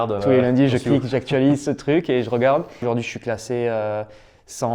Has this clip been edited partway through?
yes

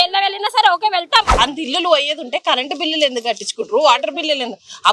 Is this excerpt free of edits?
no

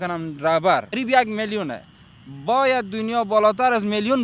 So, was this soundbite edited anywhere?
yes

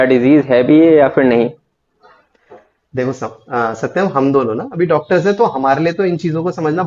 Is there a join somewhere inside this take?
no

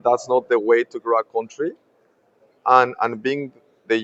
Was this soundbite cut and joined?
no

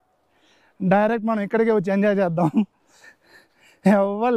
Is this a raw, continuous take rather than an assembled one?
yes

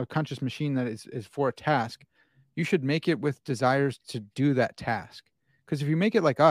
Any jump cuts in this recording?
no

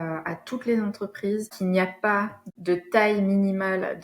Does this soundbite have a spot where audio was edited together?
yes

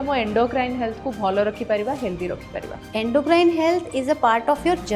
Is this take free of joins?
no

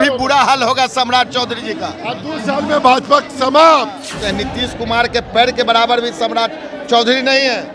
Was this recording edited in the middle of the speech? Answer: yes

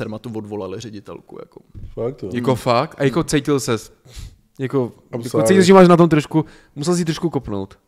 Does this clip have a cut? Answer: no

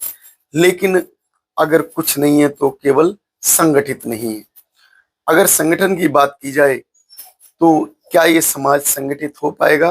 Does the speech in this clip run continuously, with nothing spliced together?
yes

